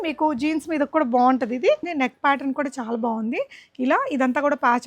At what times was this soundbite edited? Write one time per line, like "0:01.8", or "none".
0:01.9